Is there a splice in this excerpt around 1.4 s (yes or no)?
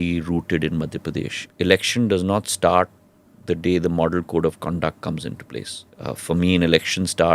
yes